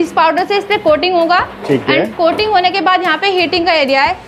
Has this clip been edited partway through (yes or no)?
no